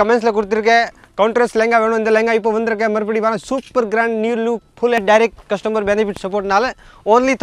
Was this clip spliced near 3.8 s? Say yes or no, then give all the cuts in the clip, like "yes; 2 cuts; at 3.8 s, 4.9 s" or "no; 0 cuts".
no; 1 cut; at 5.0 s